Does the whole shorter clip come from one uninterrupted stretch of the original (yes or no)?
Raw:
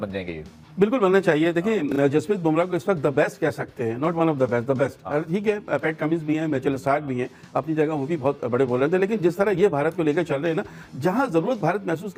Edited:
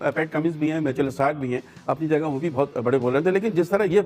yes